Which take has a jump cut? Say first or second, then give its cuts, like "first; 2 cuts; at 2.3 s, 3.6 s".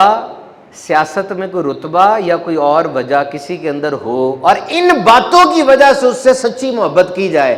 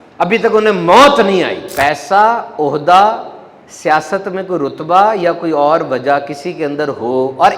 second; 1 cut; at 1.6 s